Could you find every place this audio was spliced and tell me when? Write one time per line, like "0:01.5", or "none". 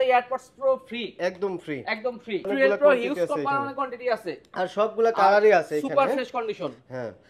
0:02.5